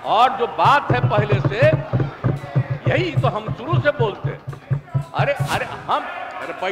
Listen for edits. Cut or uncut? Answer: uncut